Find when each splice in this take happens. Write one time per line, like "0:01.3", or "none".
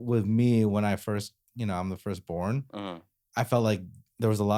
none